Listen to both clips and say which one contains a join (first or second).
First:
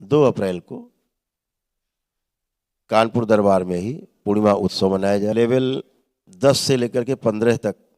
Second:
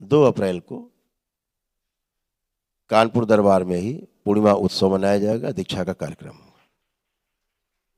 first